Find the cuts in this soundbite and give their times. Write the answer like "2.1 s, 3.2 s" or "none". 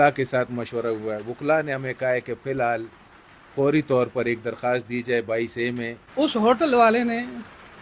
6.0 s